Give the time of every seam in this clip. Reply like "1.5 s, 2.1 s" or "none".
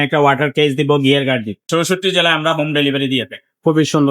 1.7 s